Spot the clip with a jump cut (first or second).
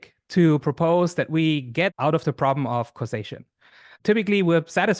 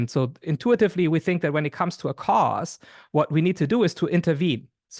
first